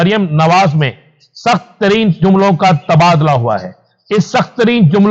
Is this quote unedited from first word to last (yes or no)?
yes